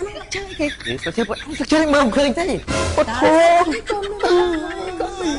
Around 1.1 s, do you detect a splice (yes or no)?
no